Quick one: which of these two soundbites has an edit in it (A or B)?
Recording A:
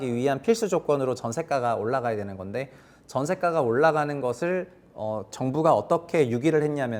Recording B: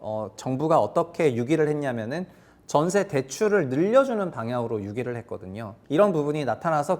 B